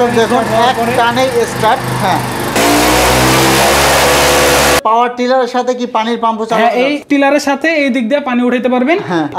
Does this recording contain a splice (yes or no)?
yes